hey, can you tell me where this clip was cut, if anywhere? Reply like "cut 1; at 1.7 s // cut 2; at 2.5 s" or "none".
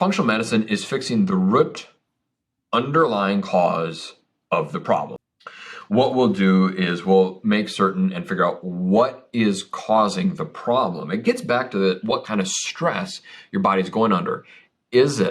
cut 1; at 5.2 s

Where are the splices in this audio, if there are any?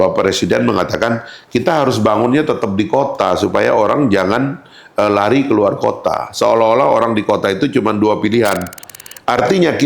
cut 1; at 8.9 s

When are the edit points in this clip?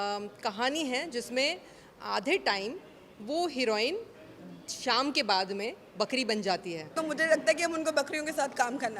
cut 1; at 6.9 s

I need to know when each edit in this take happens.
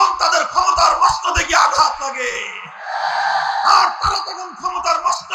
none

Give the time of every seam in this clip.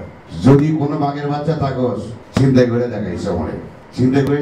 cut 1; at 2.1 s

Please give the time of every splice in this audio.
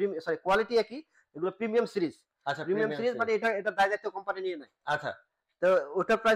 none

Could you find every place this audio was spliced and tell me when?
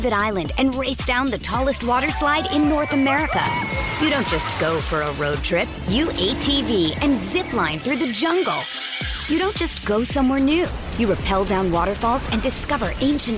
none

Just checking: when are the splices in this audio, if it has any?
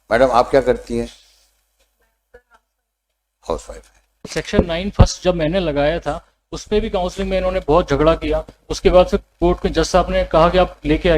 cut 1; at 4.2 s

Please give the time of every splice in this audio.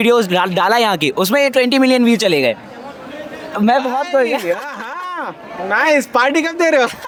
none

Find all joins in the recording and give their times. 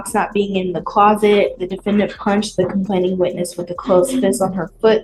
none

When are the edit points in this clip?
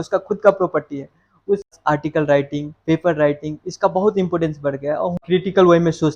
cut 1; at 1.7 s // cut 2; at 5.2 s

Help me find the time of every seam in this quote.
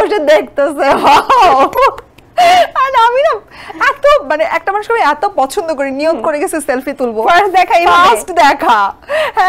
none

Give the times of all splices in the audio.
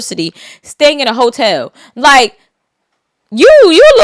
none

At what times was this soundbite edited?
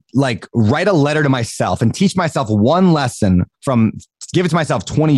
none

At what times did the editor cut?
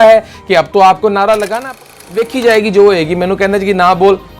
cut 1; at 1.8 s

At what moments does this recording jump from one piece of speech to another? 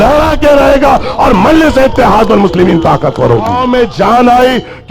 cut 1; at 3.5 s

